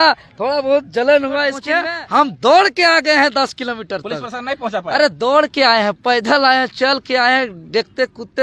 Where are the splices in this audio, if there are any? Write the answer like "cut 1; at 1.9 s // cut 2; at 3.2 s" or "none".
cut 1; at 1.6 s